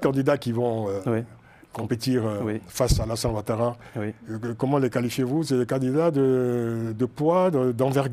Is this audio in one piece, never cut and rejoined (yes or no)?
yes